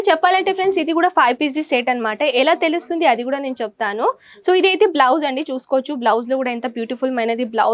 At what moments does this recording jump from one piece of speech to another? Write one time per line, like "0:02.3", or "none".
none